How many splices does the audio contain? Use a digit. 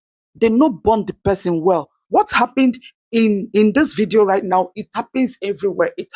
1